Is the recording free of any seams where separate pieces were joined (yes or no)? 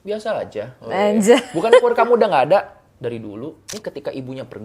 no